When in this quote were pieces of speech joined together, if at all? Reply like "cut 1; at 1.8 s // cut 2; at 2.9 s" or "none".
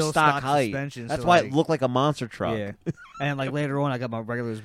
none